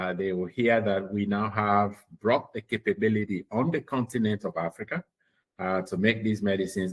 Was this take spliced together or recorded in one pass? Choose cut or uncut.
uncut